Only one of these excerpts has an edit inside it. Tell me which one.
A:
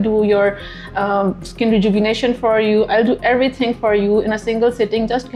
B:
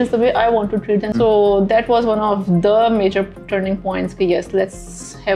B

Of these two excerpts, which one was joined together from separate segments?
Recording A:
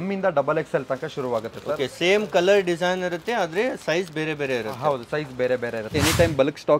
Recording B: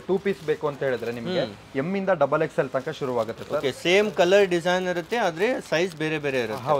A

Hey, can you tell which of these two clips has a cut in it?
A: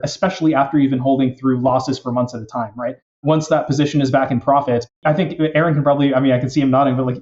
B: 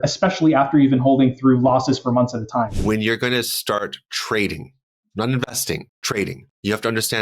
B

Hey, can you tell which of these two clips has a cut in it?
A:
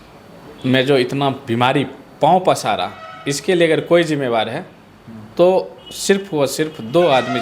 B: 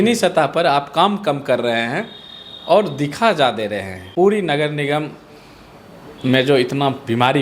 B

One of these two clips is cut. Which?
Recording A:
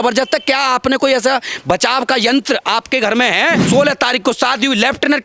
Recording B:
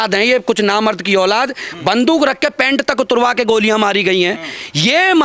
A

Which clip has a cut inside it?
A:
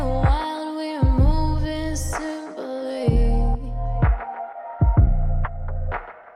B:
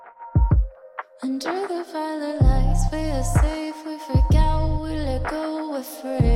B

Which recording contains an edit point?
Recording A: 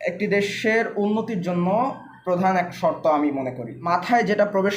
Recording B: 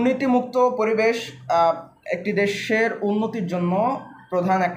A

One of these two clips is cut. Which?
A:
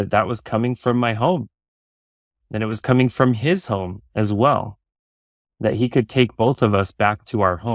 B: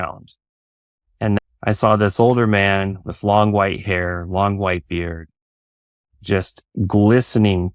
B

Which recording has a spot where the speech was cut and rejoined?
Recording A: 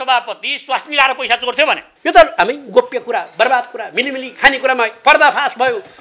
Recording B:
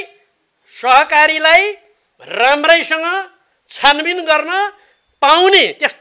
A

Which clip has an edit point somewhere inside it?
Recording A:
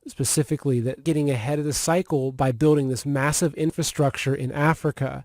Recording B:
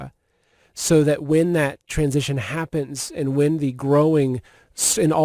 A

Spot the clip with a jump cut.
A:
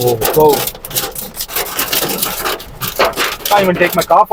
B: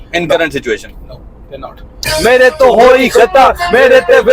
B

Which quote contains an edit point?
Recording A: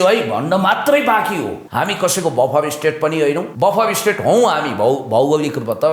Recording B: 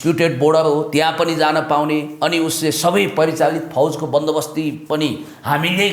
A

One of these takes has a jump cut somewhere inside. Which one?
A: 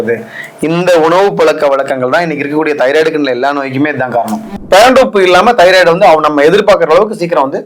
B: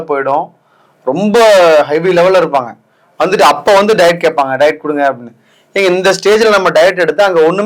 A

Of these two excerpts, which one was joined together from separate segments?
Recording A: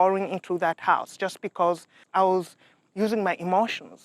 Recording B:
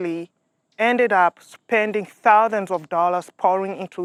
A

